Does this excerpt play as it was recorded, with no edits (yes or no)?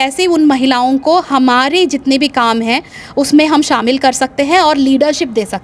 yes